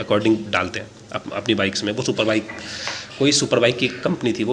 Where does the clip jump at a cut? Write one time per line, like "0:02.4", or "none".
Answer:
none